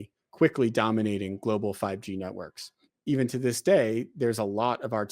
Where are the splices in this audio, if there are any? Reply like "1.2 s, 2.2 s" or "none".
2.9 s